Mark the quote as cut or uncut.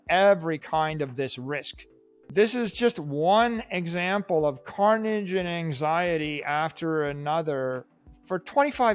uncut